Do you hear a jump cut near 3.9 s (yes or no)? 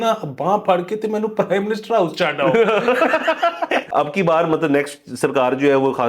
yes